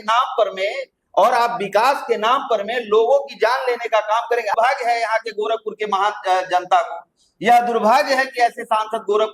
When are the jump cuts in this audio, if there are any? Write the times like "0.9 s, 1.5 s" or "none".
4.5 s

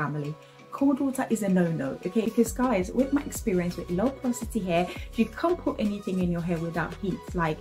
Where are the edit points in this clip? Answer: 2.3 s

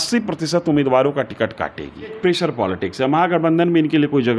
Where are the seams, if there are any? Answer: 2.1 s

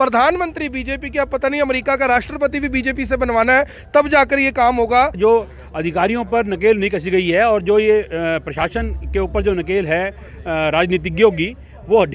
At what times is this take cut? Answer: 5.2 s

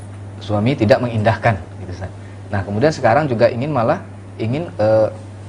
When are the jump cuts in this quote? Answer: none

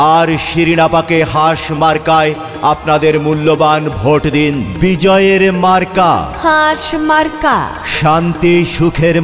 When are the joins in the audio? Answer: 4.7 s

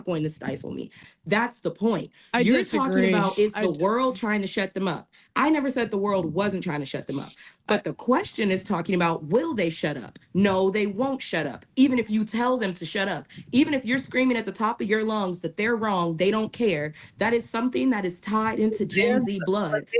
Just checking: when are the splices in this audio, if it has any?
none

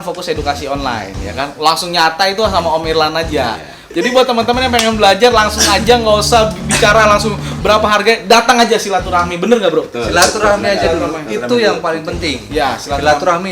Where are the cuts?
3.9 s

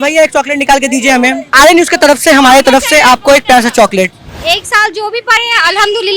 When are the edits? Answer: 4.2 s

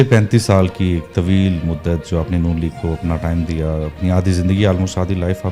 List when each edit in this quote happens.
none

